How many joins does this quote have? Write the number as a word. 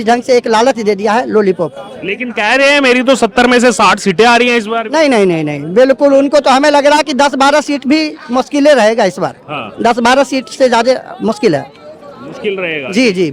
zero